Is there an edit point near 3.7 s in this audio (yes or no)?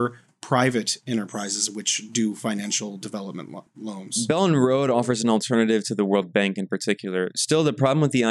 yes